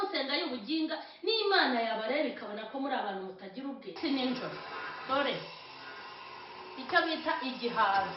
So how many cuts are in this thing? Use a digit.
1